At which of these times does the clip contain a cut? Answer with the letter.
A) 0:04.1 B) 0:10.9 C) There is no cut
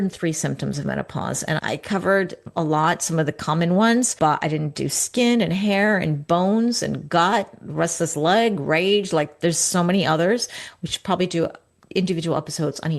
A